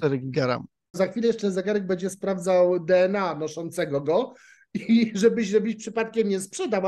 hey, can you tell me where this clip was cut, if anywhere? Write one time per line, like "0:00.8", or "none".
0:01.0

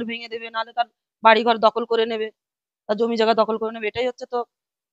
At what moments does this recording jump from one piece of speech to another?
none

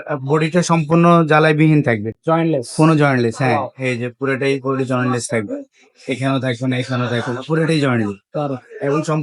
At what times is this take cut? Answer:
none

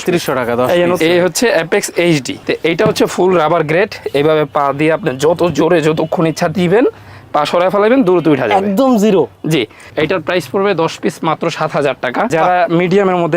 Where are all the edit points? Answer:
0:01.0
0:02.4
0:09.8
0:12.3

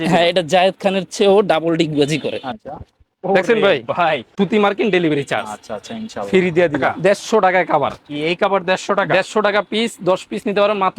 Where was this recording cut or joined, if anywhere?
0:02.5
0:04.3
0:06.8

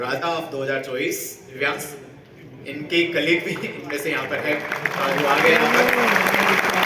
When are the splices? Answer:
0:01.4

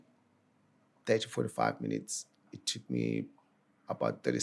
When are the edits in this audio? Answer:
0:02.5

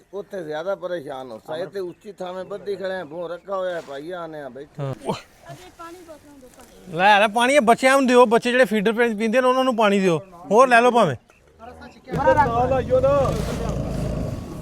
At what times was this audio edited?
0:04.9
0:12.0

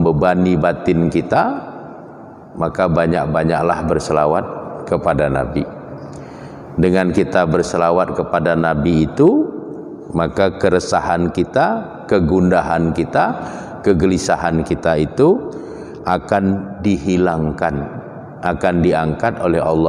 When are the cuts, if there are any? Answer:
none

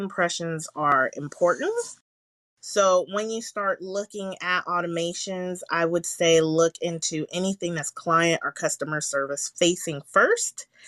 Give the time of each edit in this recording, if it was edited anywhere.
none

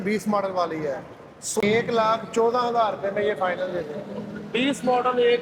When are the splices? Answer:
0:01.6

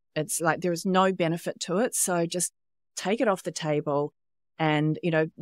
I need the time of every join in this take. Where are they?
none

